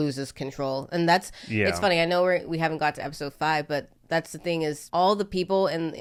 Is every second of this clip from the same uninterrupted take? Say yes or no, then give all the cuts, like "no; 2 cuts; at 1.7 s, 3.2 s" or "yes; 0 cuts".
yes; 0 cuts